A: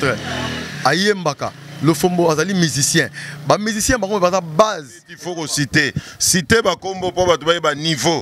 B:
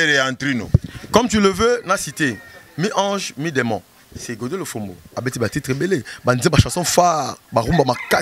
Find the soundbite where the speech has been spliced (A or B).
A